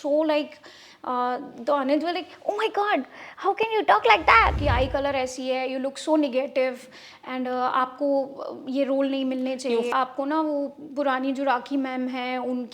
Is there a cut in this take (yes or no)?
yes